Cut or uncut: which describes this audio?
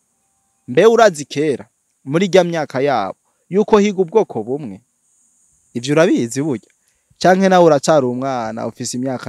uncut